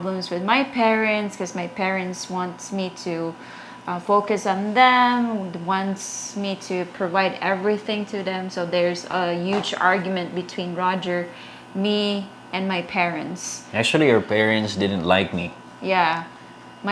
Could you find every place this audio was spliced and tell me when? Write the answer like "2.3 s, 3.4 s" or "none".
none